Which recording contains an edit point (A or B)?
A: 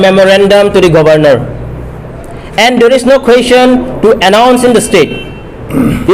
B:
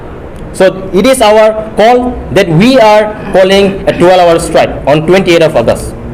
A